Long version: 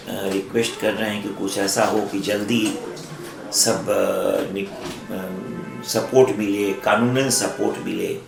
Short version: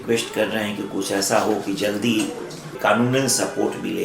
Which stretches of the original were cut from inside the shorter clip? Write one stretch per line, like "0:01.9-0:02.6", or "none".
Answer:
0:03.2-0:06.8